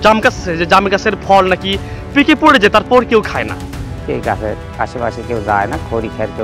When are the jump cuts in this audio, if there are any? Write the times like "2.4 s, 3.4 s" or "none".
4.0 s